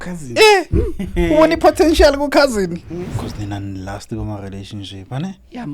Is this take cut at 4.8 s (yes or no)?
no